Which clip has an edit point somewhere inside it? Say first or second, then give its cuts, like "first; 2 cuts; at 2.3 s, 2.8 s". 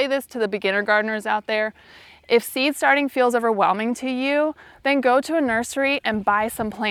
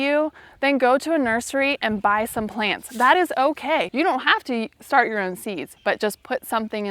second; 2 cuts; at 3.9 s, 5.7 s